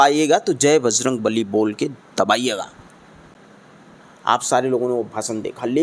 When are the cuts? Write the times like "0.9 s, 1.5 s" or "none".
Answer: none